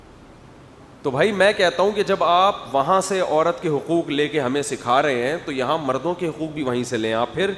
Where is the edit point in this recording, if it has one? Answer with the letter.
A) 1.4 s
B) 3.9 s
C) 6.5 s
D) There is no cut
B